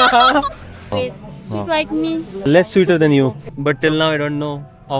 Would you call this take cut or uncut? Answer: cut